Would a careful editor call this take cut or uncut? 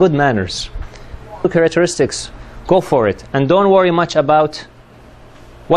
uncut